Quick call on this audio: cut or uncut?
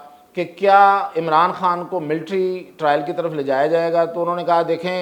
uncut